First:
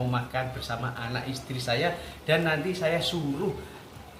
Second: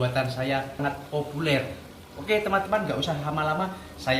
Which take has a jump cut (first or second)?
second